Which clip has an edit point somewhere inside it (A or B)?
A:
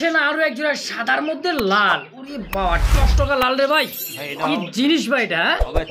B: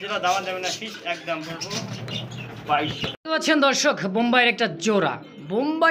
B